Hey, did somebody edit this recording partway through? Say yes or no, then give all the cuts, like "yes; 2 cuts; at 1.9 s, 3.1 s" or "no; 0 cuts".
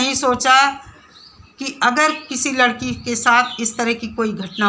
no; 0 cuts